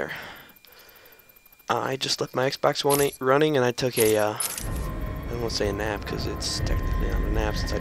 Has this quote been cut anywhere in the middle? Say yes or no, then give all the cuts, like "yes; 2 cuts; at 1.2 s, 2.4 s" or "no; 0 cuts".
no; 0 cuts